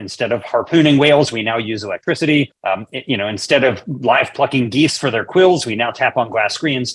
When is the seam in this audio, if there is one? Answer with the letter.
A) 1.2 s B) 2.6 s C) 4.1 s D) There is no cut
B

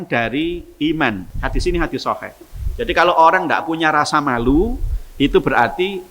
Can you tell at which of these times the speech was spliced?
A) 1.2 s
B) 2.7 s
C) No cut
A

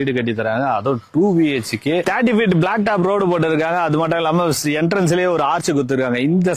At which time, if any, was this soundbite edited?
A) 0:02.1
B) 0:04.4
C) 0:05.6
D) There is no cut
A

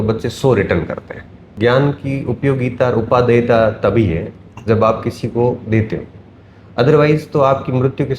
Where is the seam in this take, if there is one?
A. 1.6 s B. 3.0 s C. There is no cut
A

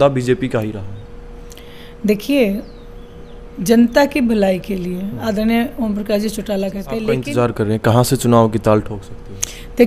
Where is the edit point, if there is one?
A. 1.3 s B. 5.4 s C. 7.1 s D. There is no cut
C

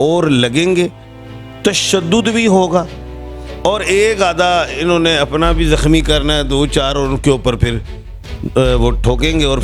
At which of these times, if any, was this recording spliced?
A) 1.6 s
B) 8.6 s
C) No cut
C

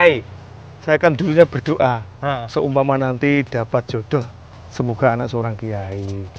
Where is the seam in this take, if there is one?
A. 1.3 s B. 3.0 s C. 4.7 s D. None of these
D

